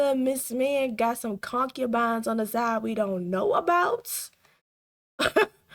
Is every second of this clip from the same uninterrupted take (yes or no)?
yes